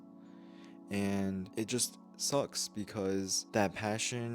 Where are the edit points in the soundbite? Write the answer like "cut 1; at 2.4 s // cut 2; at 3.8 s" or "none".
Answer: cut 1; at 1.5 s // cut 2; at 3.4 s